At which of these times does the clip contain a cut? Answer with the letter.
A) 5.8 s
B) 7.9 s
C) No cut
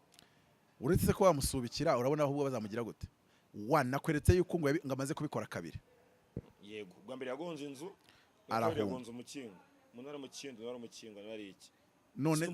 C